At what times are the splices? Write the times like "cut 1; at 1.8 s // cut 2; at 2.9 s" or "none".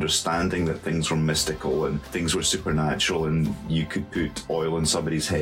cut 1; at 2.0 s